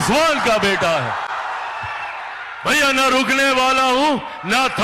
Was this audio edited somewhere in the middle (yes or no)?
no